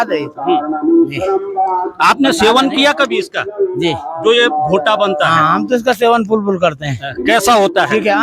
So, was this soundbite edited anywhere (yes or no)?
no